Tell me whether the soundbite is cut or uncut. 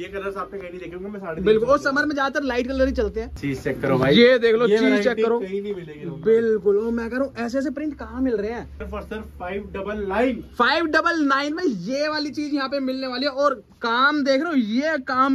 cut